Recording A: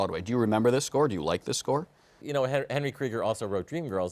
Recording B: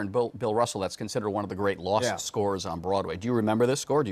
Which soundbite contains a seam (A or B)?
A